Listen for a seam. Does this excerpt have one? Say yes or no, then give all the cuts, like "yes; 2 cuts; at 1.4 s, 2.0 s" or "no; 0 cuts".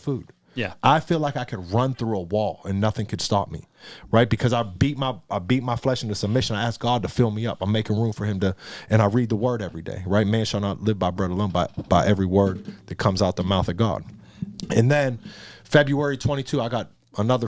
no; 0 cuts